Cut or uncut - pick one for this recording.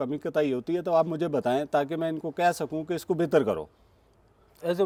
uncut